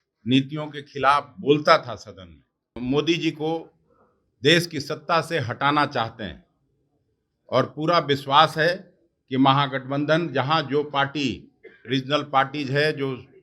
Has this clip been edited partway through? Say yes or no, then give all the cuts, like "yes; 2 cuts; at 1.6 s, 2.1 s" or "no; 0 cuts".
yes; 1 cut; at 2.9 s